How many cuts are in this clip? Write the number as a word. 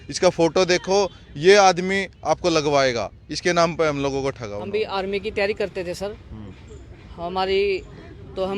one